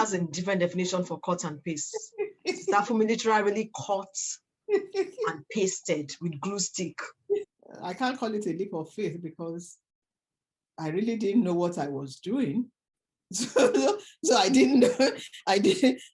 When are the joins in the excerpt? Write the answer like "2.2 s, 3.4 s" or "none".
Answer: 7.5 s